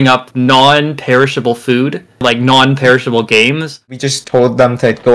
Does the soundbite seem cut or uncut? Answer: cut